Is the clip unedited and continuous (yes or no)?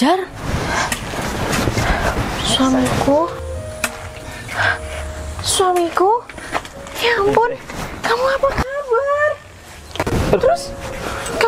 yes